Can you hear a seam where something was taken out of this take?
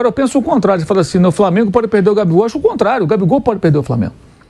no; 0 cuts

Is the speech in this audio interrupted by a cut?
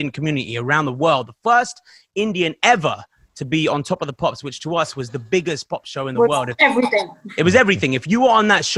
no; 0 cuts

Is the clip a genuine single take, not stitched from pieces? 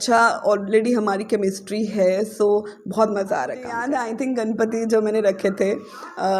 no; 1 cut; at 3.7 s

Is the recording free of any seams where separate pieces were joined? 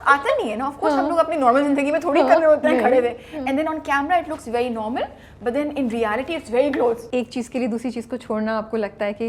no; 1 cut; at 7.0 s

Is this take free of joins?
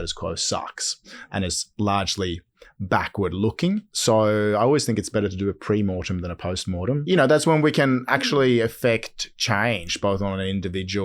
no; 2 cuts; at 3.9 s, 7.0 s

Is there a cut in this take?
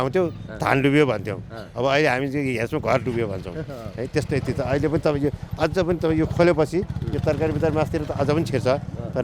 no; 0 cuts

